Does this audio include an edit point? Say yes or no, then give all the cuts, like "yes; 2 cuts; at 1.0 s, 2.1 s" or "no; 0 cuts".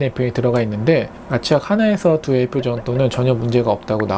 no; 0 cuts